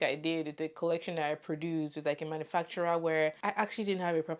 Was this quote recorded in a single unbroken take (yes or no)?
no